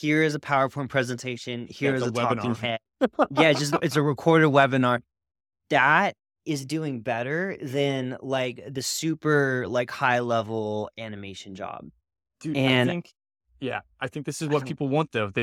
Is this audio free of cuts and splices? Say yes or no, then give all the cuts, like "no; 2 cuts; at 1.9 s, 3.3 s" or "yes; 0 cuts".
yes; 0 cuts